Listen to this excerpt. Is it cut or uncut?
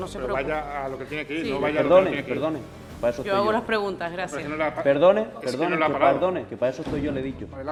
uncut